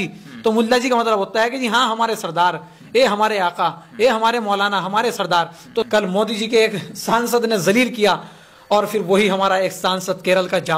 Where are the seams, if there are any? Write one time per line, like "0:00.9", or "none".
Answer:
0:05.9